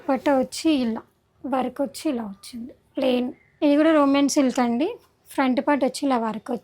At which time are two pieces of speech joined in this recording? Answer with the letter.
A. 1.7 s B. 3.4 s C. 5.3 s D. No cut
B